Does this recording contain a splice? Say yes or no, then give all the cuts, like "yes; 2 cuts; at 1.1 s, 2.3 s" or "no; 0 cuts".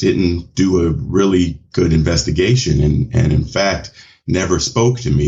no; 0 cuts